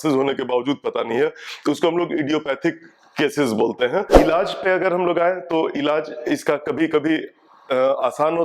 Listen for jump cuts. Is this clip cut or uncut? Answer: cut